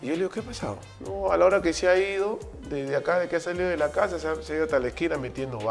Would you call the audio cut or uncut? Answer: cut